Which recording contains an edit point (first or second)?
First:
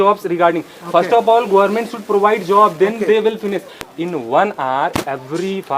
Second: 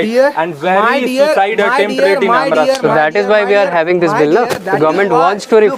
first